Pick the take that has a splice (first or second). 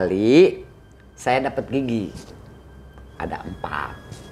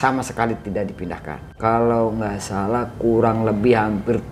second